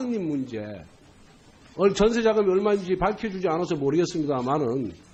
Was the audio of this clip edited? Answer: no; 0 cuts

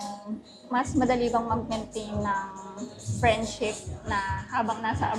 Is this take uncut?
yes; 0 cuts

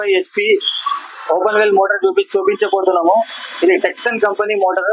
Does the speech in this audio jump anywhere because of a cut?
no; 0 cuts

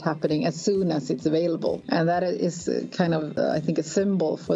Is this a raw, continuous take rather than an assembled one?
no; 2 cuts; at 1.8 s, 3.4 s

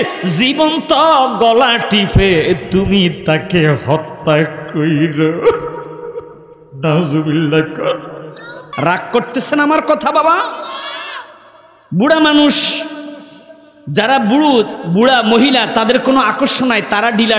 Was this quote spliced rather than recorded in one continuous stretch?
yes; 1 cut; at 8.7 s

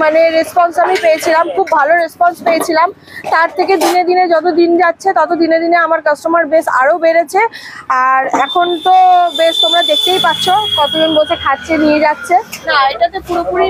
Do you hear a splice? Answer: yes; 1 cut; at 12.6 s

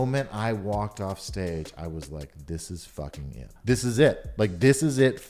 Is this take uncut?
no; 1 cut; at 3.5 s

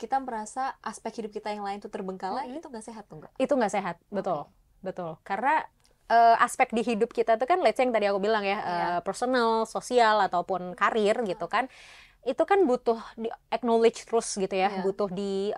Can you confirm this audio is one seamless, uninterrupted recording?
yes; 0 cuts

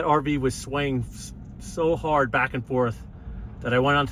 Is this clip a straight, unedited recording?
yes; 0 cuts

